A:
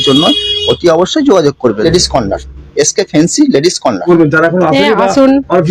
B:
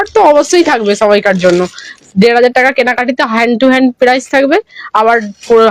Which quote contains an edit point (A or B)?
A